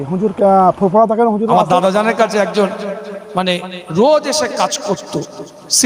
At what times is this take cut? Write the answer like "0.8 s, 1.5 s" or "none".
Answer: 1.6 s